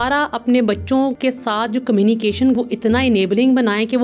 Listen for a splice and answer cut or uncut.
cut